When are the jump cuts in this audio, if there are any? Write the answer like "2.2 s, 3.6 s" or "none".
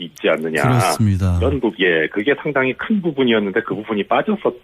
3.6 s